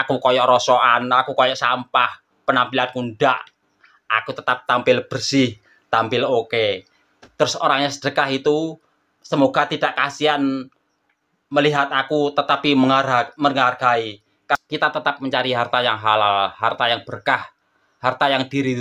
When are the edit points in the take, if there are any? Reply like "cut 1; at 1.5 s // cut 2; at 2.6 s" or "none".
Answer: none